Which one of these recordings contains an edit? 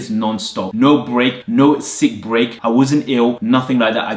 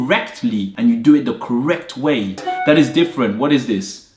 second; 1 cut; at 2.4 s

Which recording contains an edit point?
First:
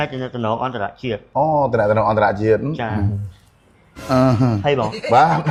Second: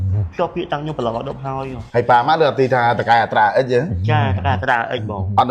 second; 1 cut; at 1.8 s

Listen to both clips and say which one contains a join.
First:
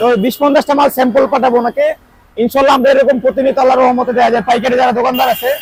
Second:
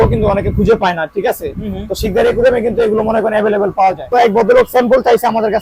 second; 1 cut; at 4.1 s

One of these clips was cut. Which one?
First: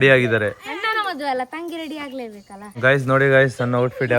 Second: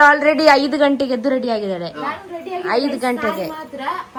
first; 1 cut; at 2.7 s

